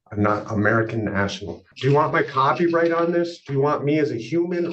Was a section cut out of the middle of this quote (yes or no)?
yes